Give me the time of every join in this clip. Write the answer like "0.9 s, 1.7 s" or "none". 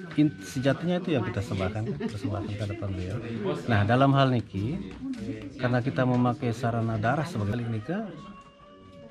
7.5 s